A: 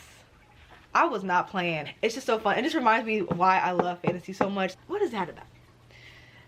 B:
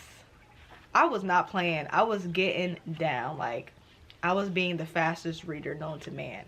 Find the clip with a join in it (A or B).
A